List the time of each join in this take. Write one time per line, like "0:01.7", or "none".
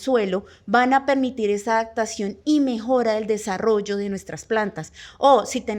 none